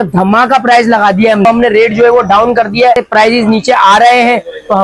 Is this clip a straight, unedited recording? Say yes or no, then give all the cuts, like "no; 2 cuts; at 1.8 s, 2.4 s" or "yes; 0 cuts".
no; 2 cuts; at 1.5 s, 3.0 s